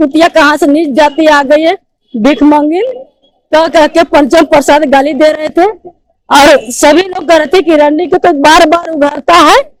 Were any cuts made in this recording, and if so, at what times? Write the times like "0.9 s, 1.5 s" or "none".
none